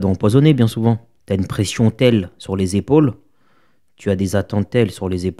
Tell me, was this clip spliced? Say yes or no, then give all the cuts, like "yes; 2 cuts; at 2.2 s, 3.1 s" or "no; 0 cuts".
yes; 1 cut; at 1.1 s